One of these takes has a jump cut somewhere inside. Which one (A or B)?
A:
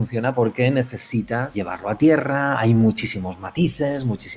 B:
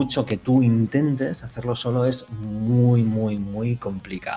A